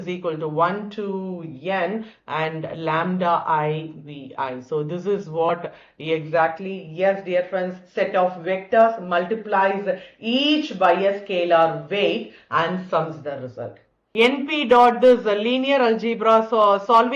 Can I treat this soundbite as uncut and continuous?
no; 1 cut; at 14.0 s

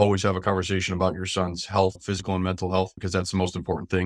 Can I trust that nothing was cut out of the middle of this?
no; 2 cuts; at 2.0 s, 3.0 s

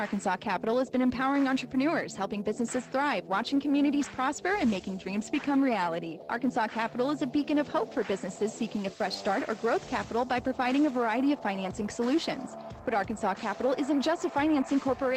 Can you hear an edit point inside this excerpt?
no; 0 cuts

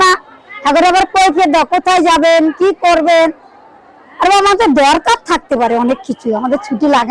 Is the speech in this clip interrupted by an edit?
no; 0 cuts

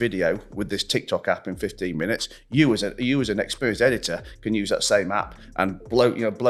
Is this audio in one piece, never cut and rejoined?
yes; 0 cuts

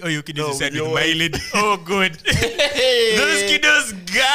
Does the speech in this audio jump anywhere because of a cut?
no; 0 cuts

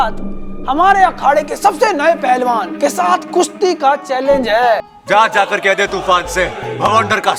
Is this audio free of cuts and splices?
yes; 0 cuts

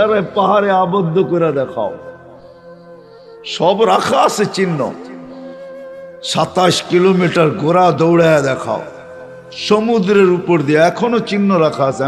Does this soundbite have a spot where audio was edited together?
yes; 2 cuts; at 5.0 s, 6.3 s

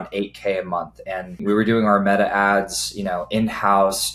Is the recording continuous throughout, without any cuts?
yes; 0 cuts

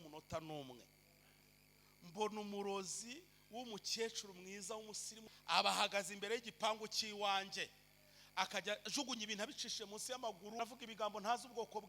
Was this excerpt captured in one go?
no; 2 cuts; at 5.1 s, 10.6 s

